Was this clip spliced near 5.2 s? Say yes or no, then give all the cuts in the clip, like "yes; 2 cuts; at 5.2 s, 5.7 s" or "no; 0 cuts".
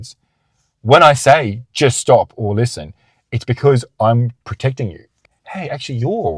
yes; 1 cut; at 5.2 s